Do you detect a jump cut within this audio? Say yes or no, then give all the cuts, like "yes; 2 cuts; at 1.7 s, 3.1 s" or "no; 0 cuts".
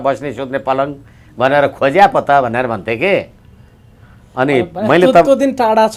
no; 0 cuts